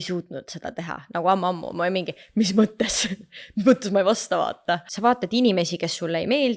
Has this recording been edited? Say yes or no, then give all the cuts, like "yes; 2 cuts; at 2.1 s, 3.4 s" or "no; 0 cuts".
yes; 1 cut; at 4.9 s